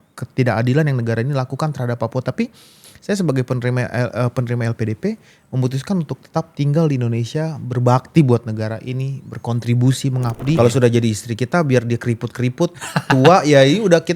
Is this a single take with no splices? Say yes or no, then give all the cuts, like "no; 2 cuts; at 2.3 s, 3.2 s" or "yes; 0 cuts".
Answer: no; 1 cut; at 10.6 s